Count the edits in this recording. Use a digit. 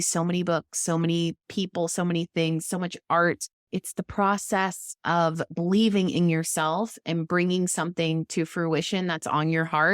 1